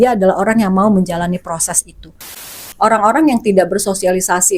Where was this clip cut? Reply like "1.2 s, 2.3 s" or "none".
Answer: 2.5 s